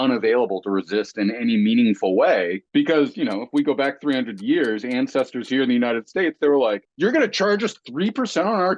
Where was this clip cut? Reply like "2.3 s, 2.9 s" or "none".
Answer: 2.6 s, 6.9 s